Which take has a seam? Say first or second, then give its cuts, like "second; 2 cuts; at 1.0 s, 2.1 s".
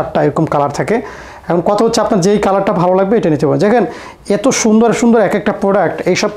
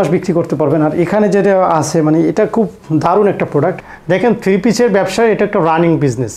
second; 1 cut; at 3.8 s